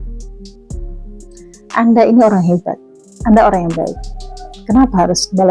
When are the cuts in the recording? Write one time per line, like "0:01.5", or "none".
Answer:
0:01.3